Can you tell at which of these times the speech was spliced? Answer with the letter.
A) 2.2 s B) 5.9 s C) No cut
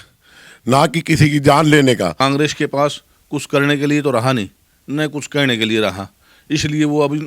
A